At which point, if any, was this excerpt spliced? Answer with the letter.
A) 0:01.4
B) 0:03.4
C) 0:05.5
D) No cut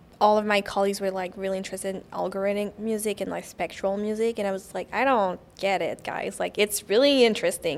D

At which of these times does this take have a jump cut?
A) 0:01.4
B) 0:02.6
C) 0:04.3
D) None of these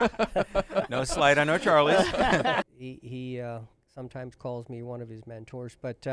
B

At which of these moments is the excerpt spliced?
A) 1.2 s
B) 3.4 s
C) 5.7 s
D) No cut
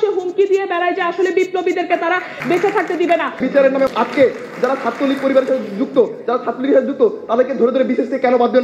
B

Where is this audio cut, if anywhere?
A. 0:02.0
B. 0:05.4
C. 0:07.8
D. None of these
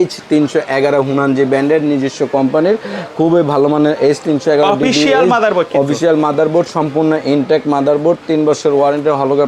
D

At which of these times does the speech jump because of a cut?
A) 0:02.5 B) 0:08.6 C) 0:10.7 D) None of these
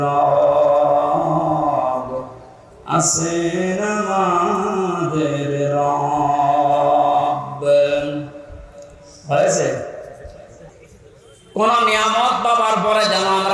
C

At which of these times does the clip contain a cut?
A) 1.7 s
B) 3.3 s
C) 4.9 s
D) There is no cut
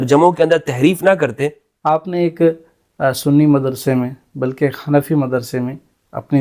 A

